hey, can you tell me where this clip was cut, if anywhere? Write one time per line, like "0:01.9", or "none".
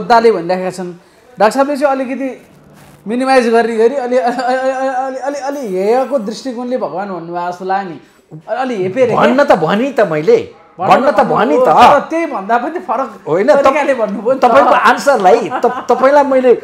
none

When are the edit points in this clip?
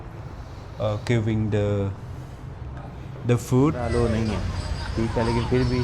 0:03.8

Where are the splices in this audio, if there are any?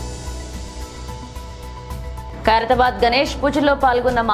0:01.0

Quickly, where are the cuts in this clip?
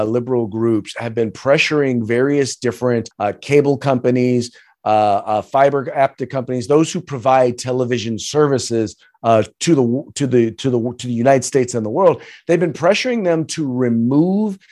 none

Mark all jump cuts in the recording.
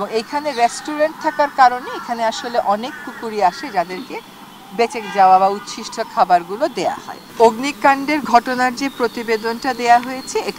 0:07.3

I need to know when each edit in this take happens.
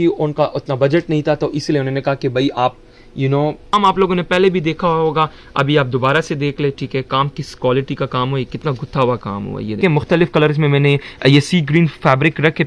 0:03.7
0:09.8

